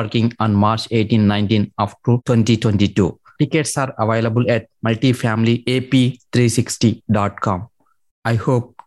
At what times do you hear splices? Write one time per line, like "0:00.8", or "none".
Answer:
0:02.2